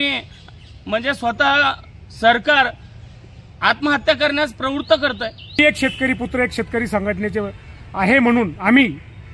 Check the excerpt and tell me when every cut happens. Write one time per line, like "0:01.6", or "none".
0:05.6